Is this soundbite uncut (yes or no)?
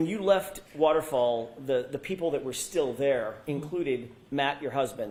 yes